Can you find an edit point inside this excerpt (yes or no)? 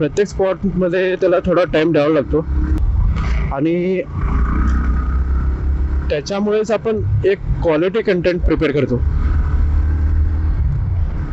no